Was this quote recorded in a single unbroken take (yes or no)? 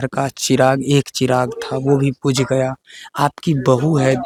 yes